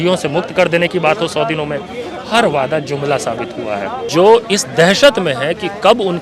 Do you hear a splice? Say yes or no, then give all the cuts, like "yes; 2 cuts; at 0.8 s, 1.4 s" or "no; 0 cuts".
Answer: yes; 1 cut; at 4.0 s